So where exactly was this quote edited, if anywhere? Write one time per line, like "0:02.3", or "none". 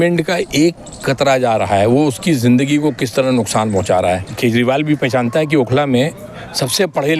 0:04.3